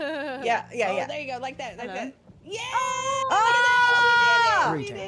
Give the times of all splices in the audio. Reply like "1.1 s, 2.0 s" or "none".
none